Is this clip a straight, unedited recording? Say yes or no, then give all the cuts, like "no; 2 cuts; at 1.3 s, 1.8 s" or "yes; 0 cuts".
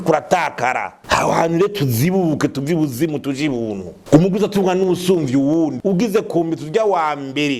no; 2 cuts; at 1.0 s, 3.9 s